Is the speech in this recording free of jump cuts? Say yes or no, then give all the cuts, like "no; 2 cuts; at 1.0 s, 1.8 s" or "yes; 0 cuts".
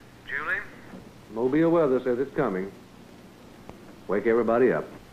no; 1 cut; at 3.9 s